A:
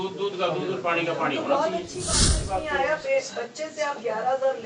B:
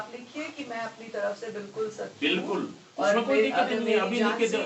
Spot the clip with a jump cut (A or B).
A